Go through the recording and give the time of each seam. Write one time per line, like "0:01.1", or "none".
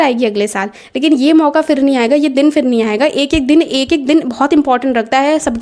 none